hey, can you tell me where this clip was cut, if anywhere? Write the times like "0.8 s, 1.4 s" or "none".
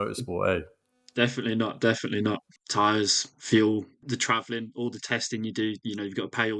2.5 s, 4.0 s